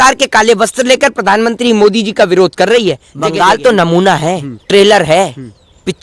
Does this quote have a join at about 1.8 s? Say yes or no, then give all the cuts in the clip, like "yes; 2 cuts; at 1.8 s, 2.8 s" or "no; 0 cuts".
no; 2 cuts; at 3.1 s, 4.5 s